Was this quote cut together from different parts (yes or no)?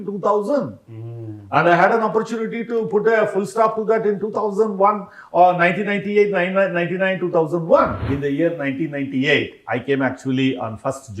yes